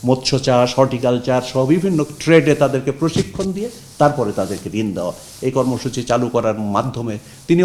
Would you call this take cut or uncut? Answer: uncut